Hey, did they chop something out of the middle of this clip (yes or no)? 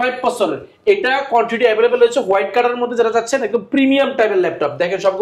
no